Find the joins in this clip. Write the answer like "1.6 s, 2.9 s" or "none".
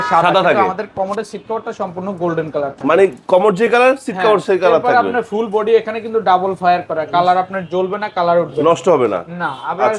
none